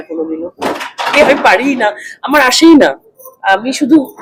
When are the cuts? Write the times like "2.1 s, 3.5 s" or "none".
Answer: none